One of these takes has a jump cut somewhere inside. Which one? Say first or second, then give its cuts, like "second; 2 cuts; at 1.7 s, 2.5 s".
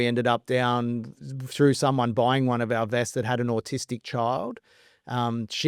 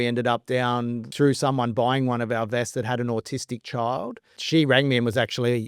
second; 2 cuts; at 1.0 s, 4.4 s